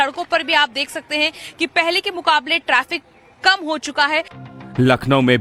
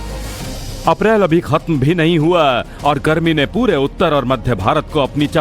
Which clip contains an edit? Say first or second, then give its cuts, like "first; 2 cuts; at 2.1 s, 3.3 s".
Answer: second; 1 cut; at 1.7 s